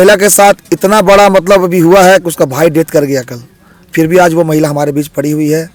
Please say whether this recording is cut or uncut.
uncut